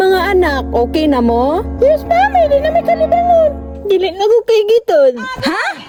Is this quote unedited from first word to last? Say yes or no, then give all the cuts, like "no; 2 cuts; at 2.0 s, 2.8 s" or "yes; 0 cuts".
yes; 0 cuts